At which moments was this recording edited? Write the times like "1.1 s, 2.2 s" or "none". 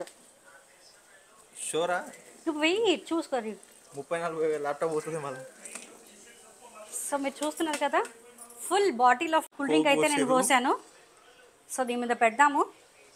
9.5 s